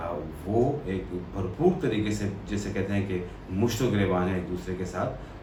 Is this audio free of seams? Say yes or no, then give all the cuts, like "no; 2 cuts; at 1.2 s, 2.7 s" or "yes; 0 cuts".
yes; 0 cuts